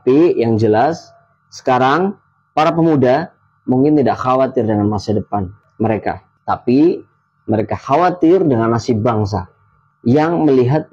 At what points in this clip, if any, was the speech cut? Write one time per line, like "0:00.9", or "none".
none